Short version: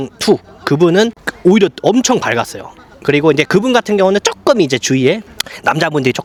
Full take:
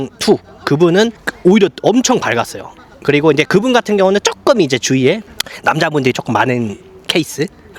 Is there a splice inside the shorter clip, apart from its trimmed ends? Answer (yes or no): no